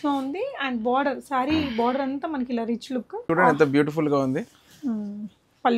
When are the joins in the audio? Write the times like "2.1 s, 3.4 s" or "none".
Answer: 3.2 s